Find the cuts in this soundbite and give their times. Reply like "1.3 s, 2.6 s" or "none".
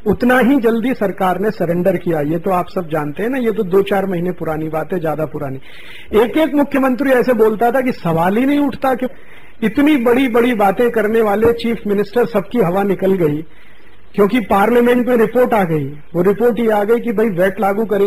none